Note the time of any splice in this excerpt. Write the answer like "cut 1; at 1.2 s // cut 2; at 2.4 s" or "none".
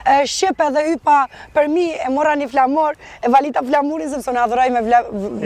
none